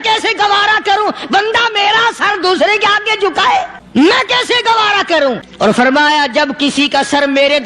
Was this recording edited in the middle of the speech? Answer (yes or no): yes